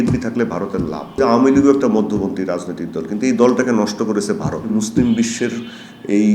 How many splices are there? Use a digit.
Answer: 2